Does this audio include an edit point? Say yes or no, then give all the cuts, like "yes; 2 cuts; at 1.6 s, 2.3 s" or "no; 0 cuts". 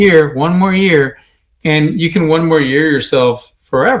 no; 0 cuts